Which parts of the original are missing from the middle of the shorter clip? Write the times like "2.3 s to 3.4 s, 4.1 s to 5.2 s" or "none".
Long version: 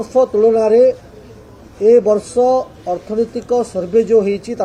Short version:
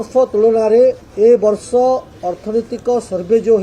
1.0 s to 1.7 s